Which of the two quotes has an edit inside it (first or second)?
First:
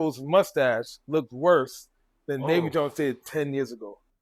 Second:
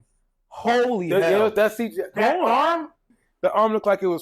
second